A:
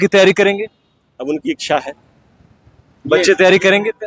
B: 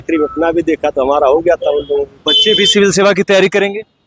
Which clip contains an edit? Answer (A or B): B